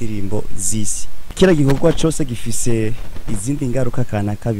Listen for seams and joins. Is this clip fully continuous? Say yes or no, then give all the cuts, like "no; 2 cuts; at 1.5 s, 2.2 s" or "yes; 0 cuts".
no; 1 cut; at 1.3 s